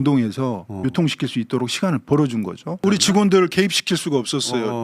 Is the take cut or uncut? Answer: cut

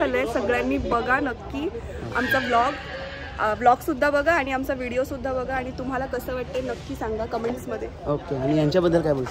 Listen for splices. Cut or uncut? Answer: uncut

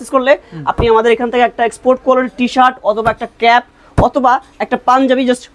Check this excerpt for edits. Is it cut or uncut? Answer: uncut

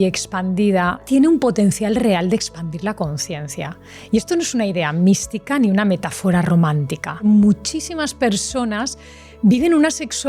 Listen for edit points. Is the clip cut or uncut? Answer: cut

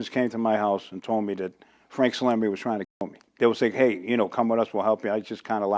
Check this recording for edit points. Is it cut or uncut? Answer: uncut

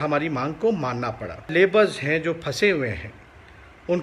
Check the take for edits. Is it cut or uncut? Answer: cut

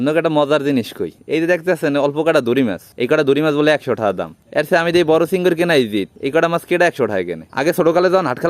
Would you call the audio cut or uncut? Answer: uncut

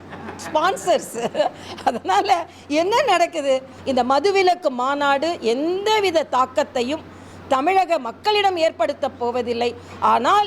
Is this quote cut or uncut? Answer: cut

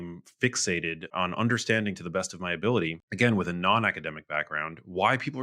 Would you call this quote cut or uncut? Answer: cut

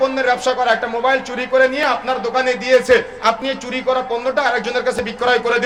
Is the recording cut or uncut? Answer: uncut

